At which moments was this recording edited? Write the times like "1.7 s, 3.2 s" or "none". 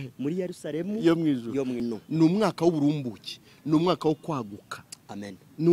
1.8 s